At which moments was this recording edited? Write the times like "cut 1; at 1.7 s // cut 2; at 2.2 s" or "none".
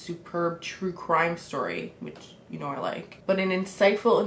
cut 1; at 3.1 s

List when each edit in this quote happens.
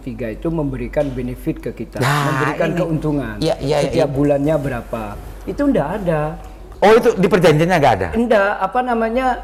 none

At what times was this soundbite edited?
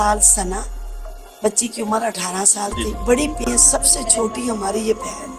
cut 1; at 3.4 s

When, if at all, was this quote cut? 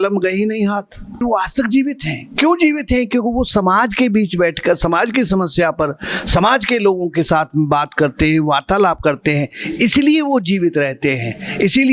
cut 1; at 1.2 s

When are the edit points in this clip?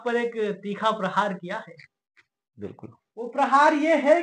none

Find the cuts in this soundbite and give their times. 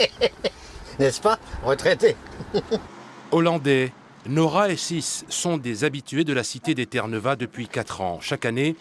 none

